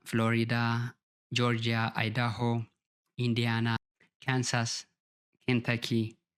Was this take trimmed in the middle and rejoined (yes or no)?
no